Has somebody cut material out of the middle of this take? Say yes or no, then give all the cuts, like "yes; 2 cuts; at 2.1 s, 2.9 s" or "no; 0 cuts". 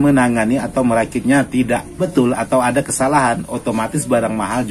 yes; 1 cut; at 2.1 s